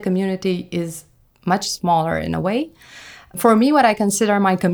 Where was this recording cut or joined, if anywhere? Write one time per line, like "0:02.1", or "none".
0:03.3